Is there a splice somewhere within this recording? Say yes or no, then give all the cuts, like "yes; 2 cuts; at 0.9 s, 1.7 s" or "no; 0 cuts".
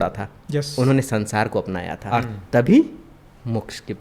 yes; 1 cut; at 1.9 s